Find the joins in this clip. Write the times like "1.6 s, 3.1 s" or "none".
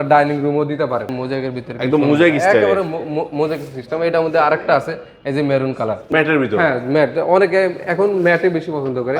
1.2 s, 6.0 s